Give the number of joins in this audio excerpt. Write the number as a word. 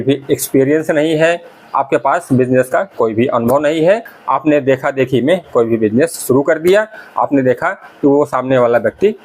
one